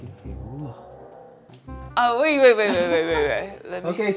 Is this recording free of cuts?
no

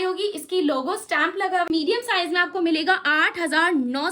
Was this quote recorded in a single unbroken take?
no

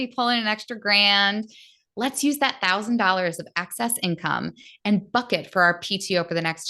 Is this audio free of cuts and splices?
yes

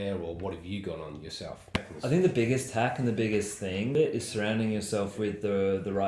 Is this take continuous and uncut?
no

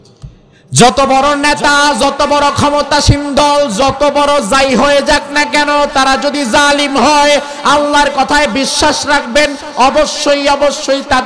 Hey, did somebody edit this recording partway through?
no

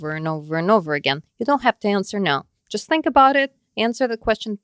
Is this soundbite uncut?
yes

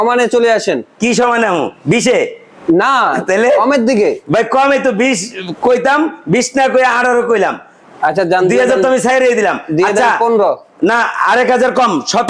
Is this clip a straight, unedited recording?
yes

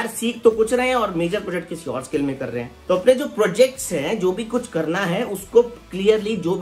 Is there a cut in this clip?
yes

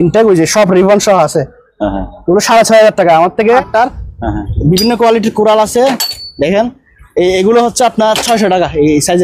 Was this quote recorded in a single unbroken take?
no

